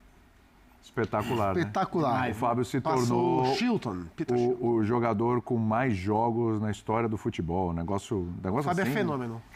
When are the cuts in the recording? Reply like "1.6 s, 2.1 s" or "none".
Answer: none